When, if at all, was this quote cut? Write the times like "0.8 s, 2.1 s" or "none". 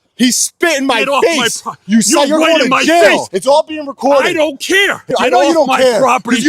3.3 s, 5.1 s